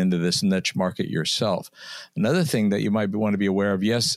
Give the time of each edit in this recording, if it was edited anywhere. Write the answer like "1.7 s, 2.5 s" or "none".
none